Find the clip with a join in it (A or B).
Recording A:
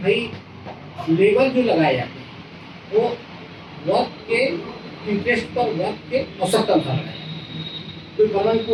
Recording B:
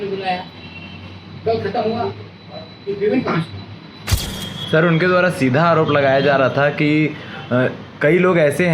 B